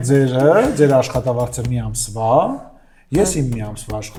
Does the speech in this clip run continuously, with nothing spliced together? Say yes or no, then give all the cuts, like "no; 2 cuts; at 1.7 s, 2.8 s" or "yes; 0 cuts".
yes; 0 cuts